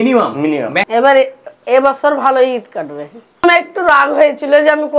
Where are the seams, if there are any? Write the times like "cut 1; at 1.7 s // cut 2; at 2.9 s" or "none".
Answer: cut 1; at 0.9 s // cut 2; at 3.4 s